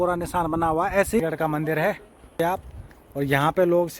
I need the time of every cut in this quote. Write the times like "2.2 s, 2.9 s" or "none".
1.2 s